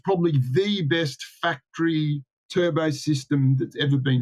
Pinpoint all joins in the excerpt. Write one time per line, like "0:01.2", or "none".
none